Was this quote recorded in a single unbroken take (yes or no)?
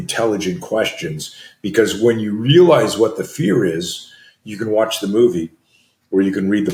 yes